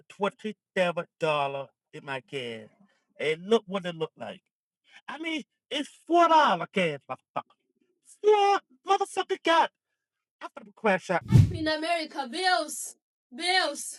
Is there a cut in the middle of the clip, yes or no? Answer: yes